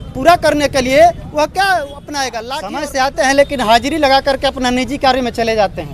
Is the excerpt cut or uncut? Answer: cut